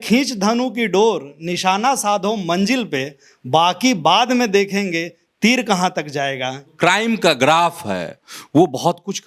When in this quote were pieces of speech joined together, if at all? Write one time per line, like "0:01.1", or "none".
0:06.7